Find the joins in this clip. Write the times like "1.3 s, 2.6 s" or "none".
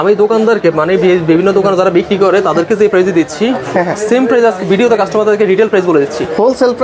none